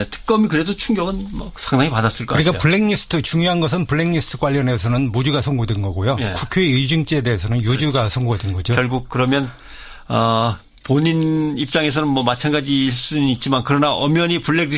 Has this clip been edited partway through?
no; 0 cuts

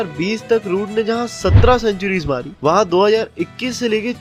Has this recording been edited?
no; 0 cuts

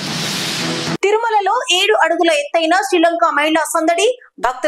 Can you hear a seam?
no; 0 cuts

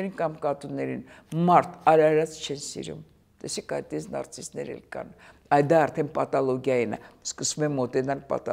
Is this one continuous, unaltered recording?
yes; 0 cuts

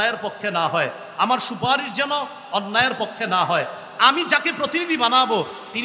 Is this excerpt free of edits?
yes; 0 cuts

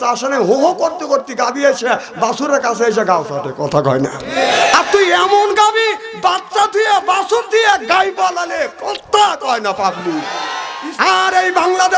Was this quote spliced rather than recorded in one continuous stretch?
yes; 1 cut; at 10.6 s

